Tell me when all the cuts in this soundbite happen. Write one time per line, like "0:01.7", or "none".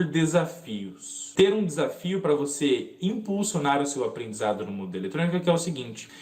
0:01.2

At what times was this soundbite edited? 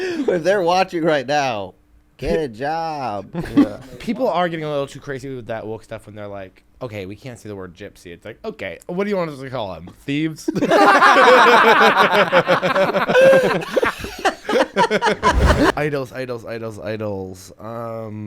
0:04.0
0:15.7

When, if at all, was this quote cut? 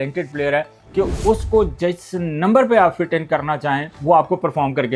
0:03.9

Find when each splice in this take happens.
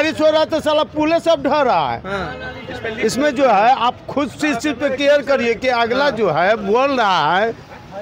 none

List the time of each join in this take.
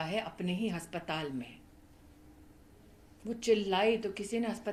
none

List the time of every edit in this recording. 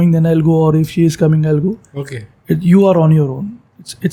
none

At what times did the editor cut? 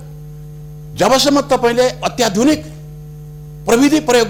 none

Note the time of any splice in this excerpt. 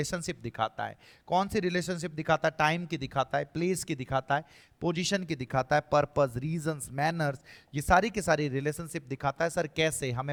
none

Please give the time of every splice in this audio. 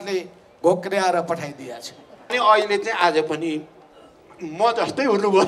0:02.3

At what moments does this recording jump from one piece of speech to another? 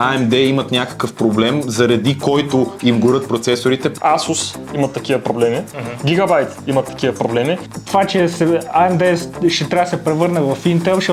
0:03.9
0:07.7

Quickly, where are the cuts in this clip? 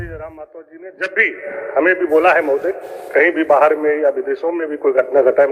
none

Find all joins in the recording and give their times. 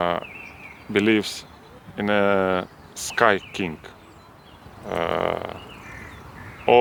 none

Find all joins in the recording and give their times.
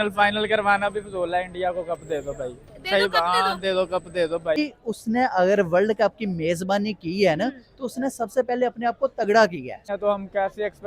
0:04.6
0:09.9

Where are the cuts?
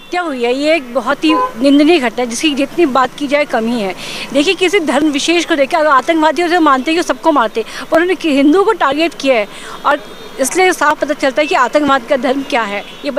none

